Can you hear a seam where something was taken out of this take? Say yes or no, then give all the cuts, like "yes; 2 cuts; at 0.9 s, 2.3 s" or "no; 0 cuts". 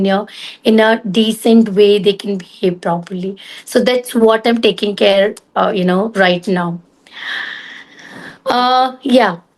no; 0 cuts